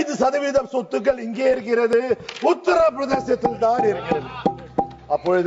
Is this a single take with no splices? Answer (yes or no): yes